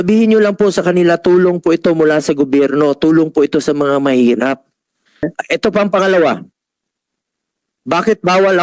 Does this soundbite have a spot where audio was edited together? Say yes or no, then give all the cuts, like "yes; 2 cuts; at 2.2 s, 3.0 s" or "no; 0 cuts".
yes; 1 cut; at 5.2 s